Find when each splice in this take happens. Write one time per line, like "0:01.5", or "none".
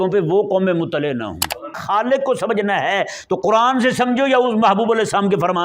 0:01.8